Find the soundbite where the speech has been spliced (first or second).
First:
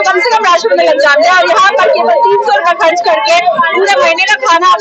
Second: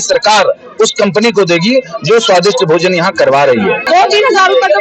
second